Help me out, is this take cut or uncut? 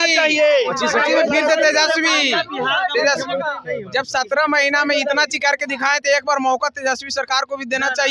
uncut